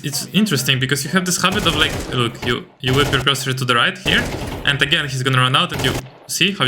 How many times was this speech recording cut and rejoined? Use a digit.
0